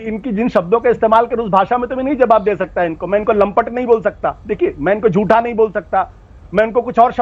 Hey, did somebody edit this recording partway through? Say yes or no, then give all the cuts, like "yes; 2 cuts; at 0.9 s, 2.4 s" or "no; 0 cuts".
no; 0 cuts